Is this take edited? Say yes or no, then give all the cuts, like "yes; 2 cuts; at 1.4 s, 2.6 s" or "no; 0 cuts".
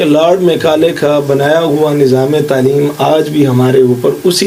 no; 0 cuts